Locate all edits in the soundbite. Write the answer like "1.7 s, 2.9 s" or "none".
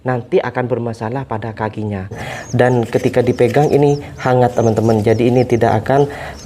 2.3 s